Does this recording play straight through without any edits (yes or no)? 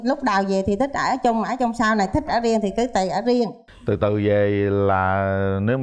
no